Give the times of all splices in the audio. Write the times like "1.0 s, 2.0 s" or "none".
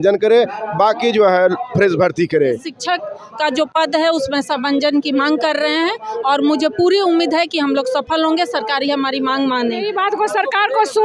2.7 s, 9.9 s